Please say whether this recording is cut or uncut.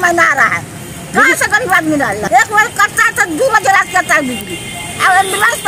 cut